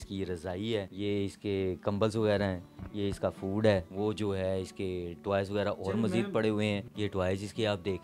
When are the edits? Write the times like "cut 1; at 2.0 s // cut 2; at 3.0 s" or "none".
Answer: none